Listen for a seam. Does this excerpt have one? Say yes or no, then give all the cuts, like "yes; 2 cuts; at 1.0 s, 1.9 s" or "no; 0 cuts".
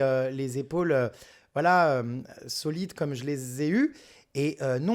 no; 0 cuts